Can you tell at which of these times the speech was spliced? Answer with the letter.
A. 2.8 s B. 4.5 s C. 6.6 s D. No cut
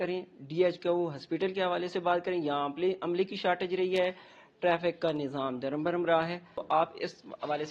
C